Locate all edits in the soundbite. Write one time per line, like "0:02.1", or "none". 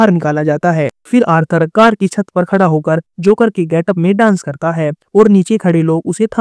0:01.0